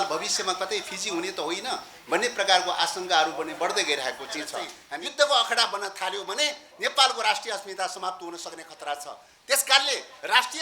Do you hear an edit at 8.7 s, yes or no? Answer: no